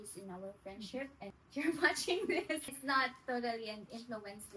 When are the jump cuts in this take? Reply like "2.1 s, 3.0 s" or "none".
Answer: 1.4 s, 2.7 s

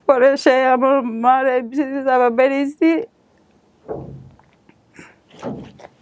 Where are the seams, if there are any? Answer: none

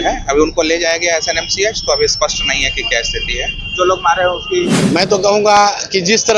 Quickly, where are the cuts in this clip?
4.8 s

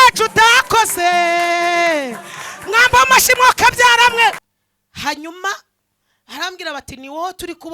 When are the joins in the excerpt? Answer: 4.5 s

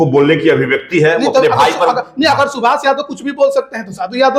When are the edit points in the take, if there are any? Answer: none

